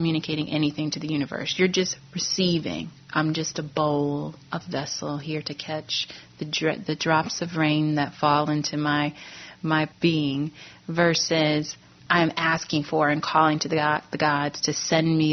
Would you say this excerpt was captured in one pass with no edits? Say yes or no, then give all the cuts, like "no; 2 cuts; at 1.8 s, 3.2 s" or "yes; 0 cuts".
no; 2 cuts; at 9.9 s, 12.0 s